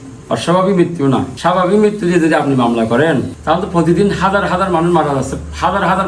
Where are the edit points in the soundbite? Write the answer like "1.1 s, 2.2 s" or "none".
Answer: 1.3 s, 3.3 s